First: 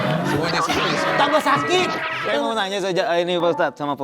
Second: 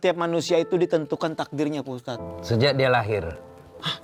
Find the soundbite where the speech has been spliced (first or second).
first